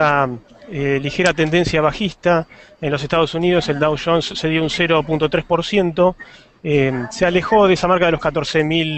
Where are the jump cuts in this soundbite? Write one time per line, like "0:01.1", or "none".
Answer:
0:07.7